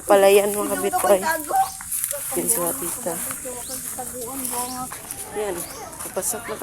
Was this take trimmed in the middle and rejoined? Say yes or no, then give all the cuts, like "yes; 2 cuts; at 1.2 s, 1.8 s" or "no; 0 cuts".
yes; 1 cut; at 4.9 s